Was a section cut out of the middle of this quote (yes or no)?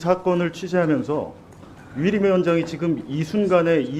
no